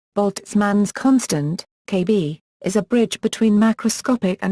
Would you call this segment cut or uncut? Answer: uncut